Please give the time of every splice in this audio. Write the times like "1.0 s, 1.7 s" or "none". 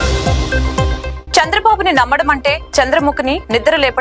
1.1 s